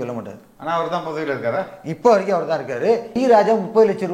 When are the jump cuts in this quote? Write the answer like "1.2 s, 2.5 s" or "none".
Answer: 3.1 s